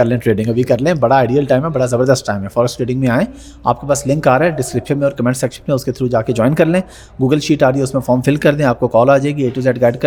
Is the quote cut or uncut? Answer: uncut